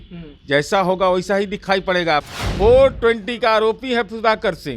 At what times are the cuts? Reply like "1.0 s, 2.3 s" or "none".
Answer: 2.4 s

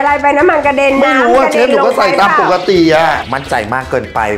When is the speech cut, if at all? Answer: 3.2 s

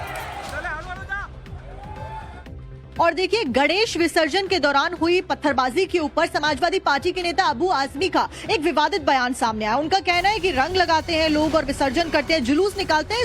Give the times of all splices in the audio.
5.0 s

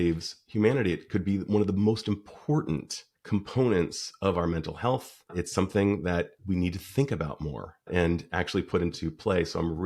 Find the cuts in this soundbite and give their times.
none

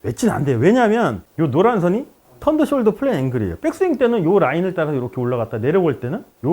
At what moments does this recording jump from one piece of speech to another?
1.2 s

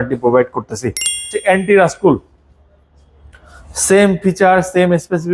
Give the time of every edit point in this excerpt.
1.3 s

